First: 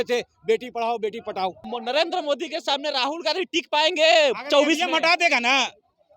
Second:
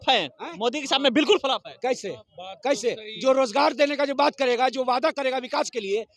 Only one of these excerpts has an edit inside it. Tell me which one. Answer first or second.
first